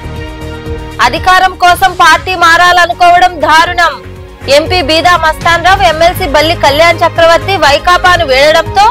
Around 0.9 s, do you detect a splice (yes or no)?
yes